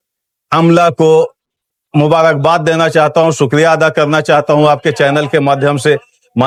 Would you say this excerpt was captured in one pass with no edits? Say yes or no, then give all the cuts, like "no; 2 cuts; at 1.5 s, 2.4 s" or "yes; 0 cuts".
yes; 0 cuts